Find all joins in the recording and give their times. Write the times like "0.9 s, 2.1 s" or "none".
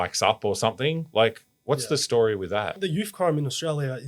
2.8 s